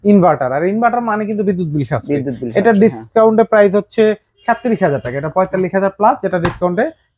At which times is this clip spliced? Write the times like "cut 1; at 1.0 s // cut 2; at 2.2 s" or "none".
none